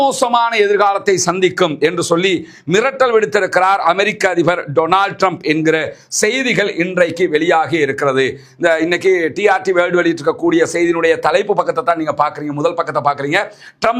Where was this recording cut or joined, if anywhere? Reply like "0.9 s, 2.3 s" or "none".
none